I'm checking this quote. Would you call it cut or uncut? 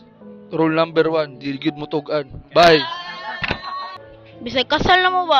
cut